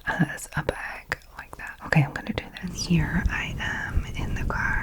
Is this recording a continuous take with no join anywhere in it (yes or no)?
no